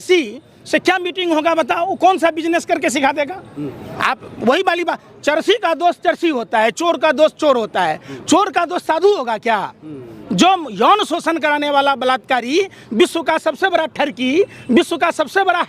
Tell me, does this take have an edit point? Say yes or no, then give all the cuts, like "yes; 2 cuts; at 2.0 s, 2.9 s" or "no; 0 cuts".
no; 0 cuts